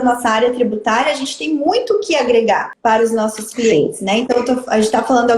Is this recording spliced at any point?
yes; 1 cut; at 2.7 s

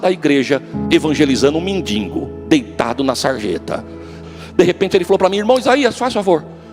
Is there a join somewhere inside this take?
yes; 1 cut; at 4.1 s

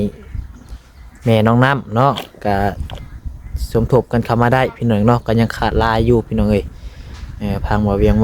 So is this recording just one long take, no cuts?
yes; 0 cuts

